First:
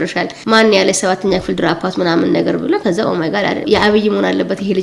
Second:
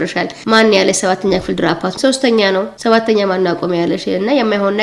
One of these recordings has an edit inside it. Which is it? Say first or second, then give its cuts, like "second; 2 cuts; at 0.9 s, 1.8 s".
second; 1 cut; at 1.9 s